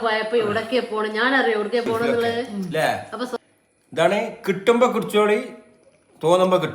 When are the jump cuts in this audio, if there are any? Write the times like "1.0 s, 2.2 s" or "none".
2.5 s